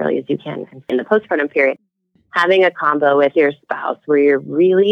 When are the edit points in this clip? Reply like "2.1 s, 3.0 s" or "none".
0.9 s